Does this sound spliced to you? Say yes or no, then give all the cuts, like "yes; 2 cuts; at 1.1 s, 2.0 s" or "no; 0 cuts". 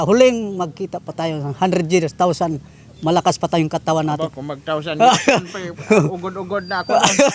no; 0 cuts